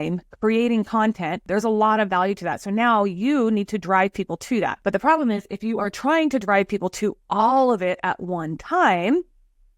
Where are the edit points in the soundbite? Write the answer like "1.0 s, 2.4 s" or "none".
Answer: 1.4 s, 4.8 s